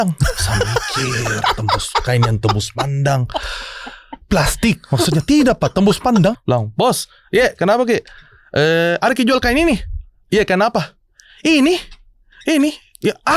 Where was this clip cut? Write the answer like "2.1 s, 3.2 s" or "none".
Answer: 6.4 s